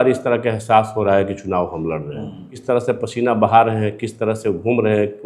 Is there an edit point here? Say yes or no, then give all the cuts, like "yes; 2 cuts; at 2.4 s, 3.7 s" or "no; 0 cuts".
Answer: yes; 1 cut; at 2.5 s